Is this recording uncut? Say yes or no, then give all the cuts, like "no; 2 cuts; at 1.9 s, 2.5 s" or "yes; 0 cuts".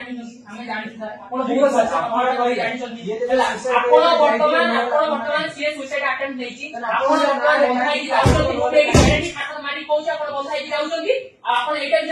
yes; 0 cuts